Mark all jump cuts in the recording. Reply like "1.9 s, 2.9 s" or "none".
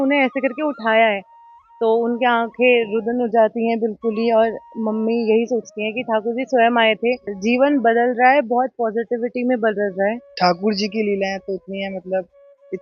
7.3 s, 10.3 s